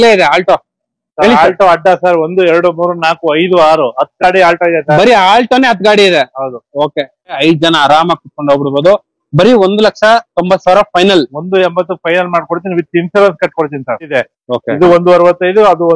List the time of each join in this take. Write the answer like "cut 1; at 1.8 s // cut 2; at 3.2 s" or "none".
cut 1; at 7.4 s // cut 2; at 14.1 s